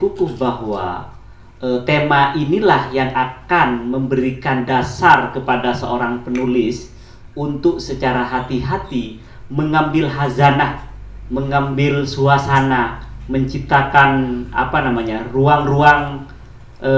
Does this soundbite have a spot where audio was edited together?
no; 0 cuts

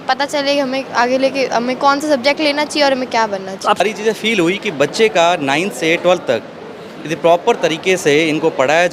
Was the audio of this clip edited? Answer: yes; 1 cut; at 3.8 s

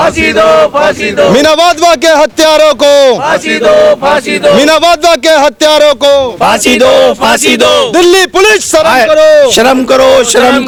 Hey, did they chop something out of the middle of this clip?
no; 0 cuts

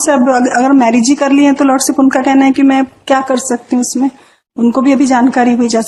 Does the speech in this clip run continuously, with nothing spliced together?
yes; 0 cuts

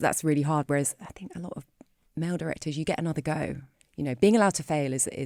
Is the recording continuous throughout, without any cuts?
no; 1 cut; at 3.9 s

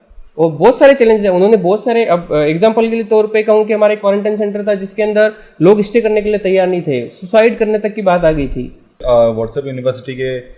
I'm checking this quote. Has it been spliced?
yes; 1 cut; at 8.9 s

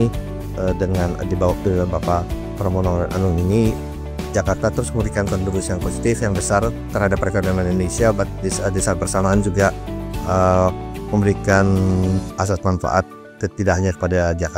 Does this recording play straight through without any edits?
yes; 0 cuts

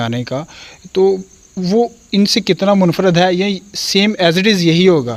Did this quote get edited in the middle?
no; 0 cuts

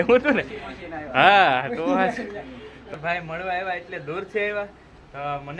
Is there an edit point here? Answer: yes; 1 cut; at 2.9 s

